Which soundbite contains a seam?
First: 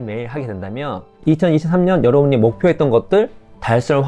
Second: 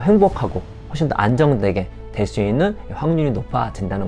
first; 1 cut; at 1.1 s

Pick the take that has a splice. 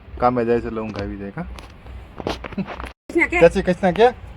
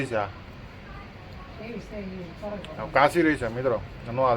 first; 1 cut; at 3.1 s

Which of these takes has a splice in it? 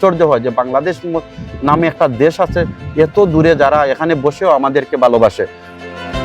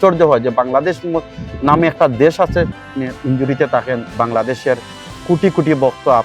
second; 1 cut; at 2.8 s

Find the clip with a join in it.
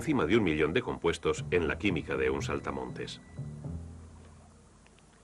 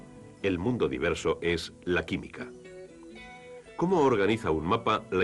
first; 1 cut; at 4.1 s

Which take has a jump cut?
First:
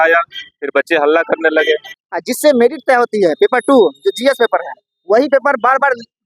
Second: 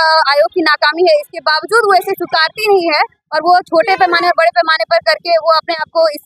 first; 1 cut; at 2.0 s

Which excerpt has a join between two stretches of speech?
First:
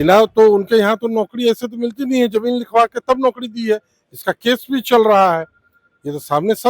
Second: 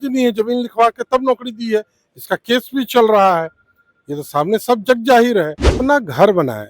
second; 1 cut; at 5.7 s

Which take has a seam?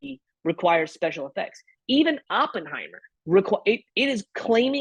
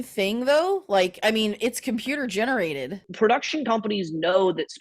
second; 1 cut; at 3.1 s

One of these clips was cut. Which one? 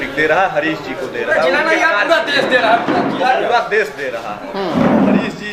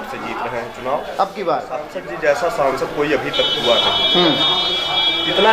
second; 1 cut; at 2.0 s

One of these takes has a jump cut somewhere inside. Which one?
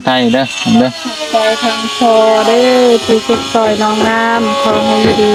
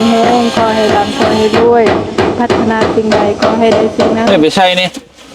second; 1 cut; at 4.3 s

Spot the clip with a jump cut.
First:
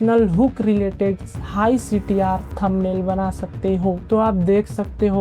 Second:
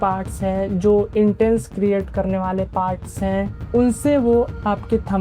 first; 1 cut; at 4.0 s

